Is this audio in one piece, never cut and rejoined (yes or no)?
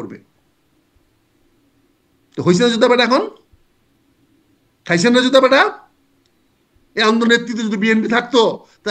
yes